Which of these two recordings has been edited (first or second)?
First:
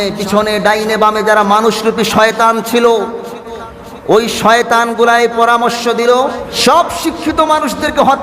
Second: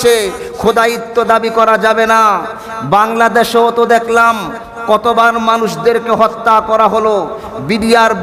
first